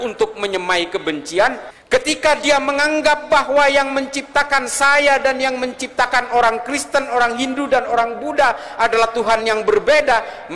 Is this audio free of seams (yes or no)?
no